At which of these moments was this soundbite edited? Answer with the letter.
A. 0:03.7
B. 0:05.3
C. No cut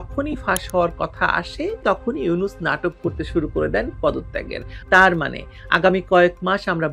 C